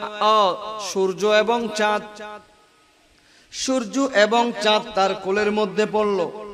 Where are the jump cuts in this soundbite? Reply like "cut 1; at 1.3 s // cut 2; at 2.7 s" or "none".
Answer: none

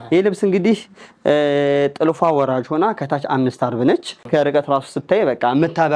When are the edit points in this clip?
cut 1; at 4.1 s

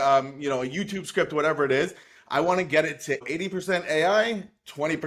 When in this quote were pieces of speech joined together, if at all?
cut 1; at 3.2 s

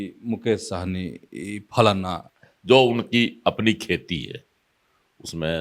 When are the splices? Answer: cut 1; at 2.2 s

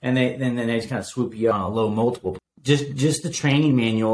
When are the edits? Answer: cut 1; at 1.5 s // cut 2; at 2.4 s

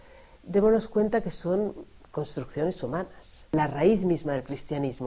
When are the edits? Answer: cut 1; at 3.5 s

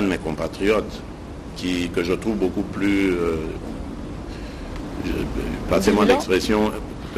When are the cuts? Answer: none

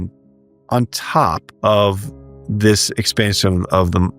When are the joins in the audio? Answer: cut 1; at 1.5 s

